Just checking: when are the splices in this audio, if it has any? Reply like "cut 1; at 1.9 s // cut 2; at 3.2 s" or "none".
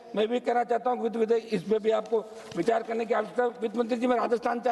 cut 1; at 1.4 s